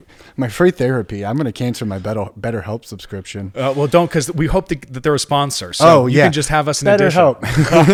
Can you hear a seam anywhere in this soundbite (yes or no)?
no